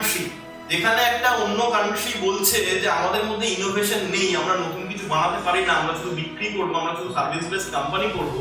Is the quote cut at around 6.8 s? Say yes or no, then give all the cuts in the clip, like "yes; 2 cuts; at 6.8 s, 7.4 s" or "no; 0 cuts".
no; 0 cuts